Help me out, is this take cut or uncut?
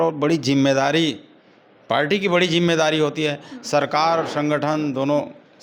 uncut